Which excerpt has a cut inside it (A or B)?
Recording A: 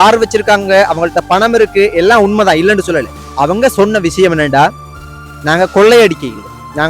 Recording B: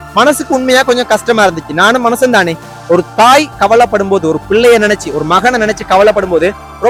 A